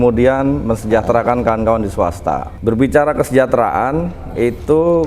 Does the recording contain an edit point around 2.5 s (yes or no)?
yes